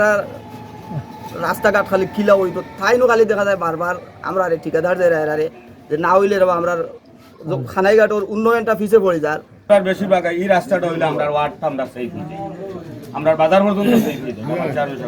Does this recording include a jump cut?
yes; 1 cut; at 9.5 s

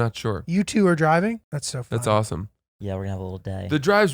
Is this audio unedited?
no; 1 cut; at 1.5 s

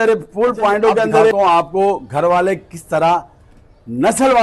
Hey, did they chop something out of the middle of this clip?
yes; 1 cut; at 1.3 s

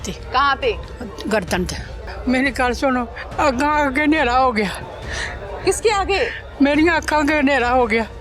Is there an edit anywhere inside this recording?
yes; 1 cut; at 2.0 s

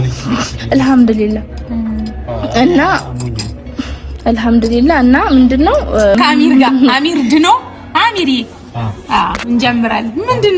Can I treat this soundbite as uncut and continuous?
no; 1 cut; at 6.2 s

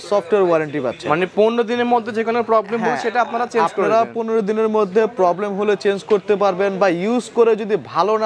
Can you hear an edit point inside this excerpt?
no; 0 cuts

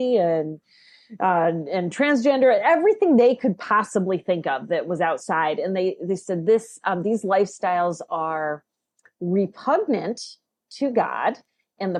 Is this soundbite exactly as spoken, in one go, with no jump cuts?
yes; 0 cuts

